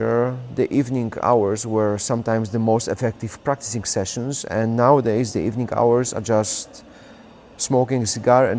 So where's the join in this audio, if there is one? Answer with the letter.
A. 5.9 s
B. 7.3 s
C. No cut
C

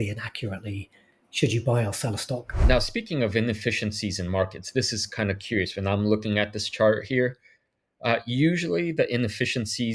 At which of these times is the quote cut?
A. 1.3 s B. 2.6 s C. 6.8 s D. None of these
B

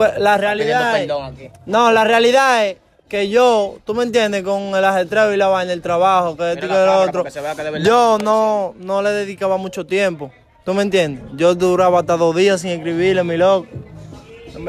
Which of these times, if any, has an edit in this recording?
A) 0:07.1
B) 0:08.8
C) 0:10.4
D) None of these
D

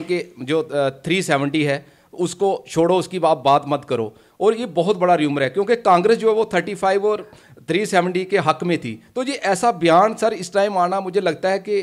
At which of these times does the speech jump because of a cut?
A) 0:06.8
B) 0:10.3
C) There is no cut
C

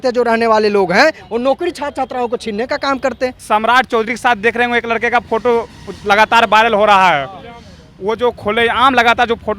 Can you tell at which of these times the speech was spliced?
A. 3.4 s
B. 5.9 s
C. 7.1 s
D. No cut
A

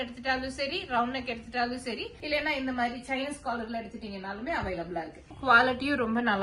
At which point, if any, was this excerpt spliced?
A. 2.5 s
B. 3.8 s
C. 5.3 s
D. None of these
C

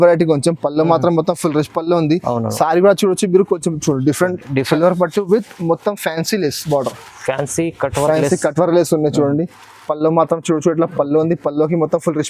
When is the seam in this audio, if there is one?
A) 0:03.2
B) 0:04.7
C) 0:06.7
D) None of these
B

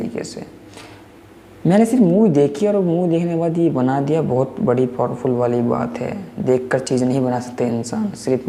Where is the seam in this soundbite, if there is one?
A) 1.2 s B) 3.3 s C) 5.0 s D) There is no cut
D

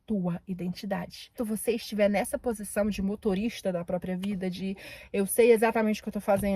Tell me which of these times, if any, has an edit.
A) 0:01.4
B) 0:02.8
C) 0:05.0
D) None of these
A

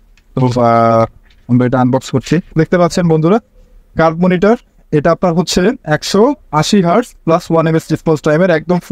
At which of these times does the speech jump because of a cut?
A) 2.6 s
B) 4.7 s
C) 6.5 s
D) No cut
A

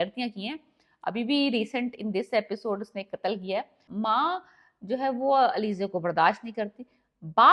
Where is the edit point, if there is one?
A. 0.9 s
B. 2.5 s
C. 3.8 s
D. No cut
C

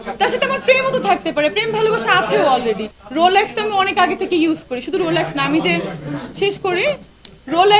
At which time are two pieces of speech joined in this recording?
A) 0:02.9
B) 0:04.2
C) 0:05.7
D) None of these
A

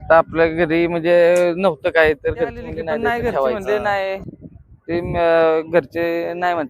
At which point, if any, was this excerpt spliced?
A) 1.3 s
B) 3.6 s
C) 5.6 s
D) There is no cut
B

